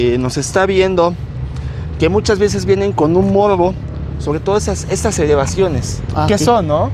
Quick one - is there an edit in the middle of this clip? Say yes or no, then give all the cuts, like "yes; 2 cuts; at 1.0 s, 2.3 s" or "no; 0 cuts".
no; 0 cuts